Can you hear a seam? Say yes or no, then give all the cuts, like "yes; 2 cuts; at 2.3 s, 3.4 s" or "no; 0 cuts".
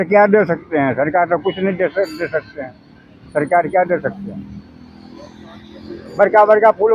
no; 0 cuts